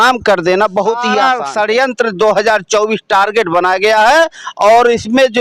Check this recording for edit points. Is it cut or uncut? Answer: cut